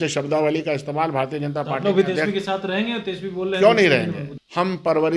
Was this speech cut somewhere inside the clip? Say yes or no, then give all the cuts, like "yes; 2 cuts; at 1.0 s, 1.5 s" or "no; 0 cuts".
yes; 1 cut; at 4.3 s